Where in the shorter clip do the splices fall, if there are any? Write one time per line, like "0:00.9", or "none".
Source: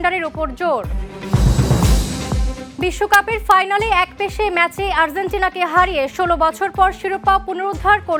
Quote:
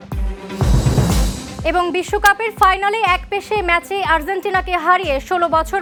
none